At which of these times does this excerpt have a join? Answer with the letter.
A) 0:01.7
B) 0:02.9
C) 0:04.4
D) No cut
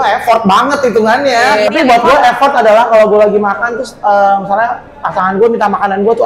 A